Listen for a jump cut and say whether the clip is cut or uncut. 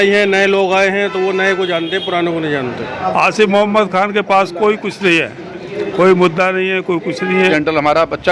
cut